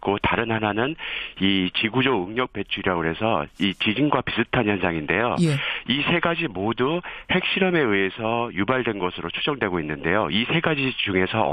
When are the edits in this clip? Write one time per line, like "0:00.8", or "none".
0:05.2